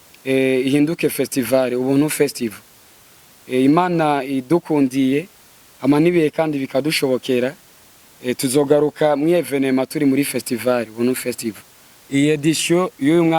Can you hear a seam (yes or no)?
yes